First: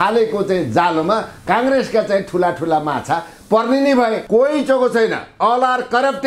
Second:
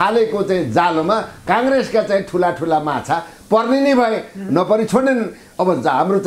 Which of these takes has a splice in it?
first; 1 cut; at 4.2 s

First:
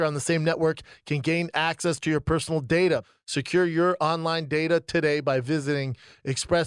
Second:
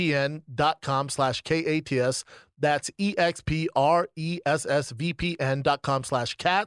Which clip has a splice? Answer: first; 1 cut; at 3.1 s

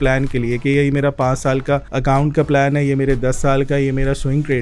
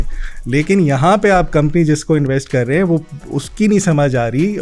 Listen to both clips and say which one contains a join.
first; 1 cut; at 1.9 s

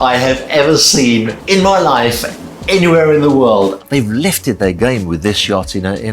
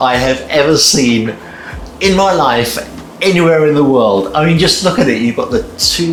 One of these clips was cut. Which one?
first; 2 cuts; at 1.4 s, 3.8 s

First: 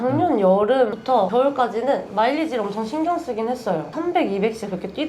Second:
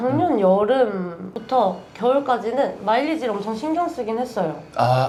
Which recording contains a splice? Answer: first; 2 cuts; at 1.1 s, 3.9 s

